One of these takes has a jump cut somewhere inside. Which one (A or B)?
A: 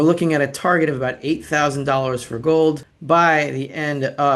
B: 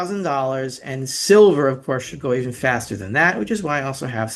A